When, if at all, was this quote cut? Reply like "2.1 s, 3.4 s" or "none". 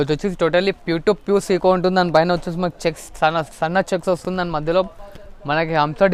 none

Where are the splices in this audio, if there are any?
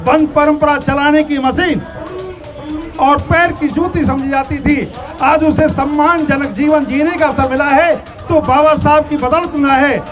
none

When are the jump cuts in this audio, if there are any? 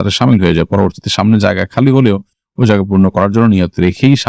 none

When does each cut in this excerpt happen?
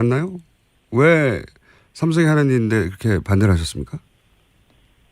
1.5 s

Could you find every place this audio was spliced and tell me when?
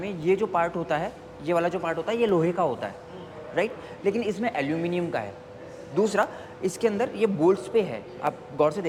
none

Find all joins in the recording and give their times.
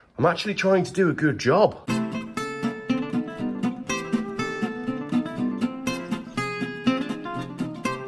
none

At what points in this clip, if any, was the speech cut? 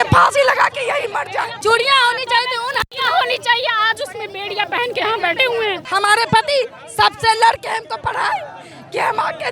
1.5 s, 5.8 s

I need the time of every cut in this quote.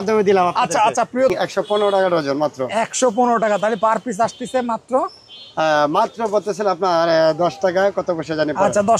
1.3 s

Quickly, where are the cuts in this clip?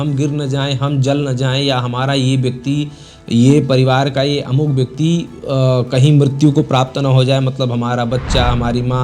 none

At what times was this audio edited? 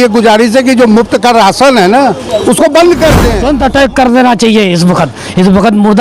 3.3 s

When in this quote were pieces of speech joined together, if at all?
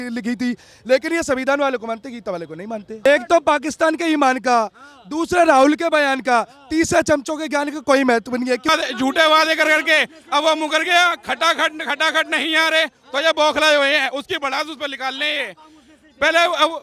3.1 s, 8.7 s

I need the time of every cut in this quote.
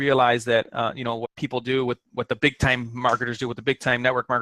1.2 s

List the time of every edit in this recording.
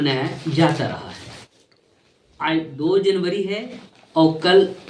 none

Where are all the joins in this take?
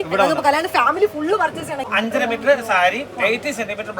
1.9 s

